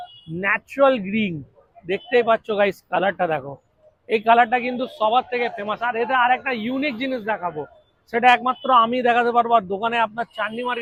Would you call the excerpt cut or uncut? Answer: uncut